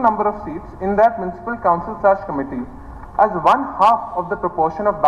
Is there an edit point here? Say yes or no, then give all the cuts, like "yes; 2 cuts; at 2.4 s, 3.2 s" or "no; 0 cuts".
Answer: no; 0 cuts